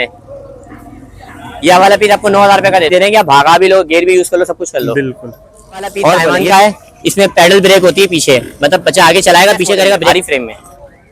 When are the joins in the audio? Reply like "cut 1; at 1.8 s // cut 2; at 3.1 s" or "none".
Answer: cut 1; at 2.9 s // cut 2; at 6.4 s // cut 3; at 10.1 s